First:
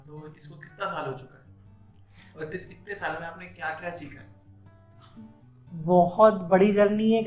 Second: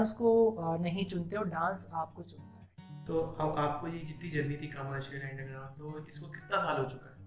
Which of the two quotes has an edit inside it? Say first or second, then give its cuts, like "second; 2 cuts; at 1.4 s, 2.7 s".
second; 1 cut; at 2.9 s